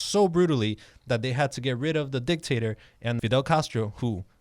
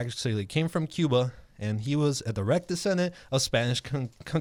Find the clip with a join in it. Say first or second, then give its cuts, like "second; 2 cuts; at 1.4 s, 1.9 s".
first; 1 cut; at 3.2 s